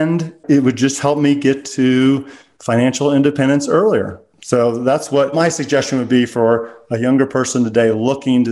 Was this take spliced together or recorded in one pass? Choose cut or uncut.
uncut